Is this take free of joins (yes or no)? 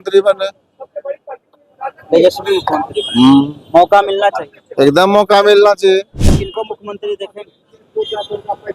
no